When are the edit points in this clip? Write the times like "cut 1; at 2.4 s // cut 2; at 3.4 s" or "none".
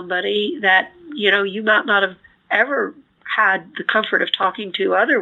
none